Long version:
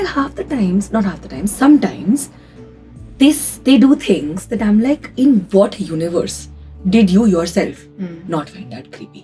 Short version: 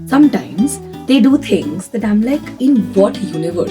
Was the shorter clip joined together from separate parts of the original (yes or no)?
yes